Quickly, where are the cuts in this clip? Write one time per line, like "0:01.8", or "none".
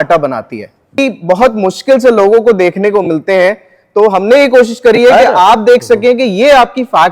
0:01.0